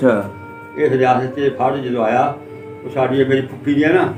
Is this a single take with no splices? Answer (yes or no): yes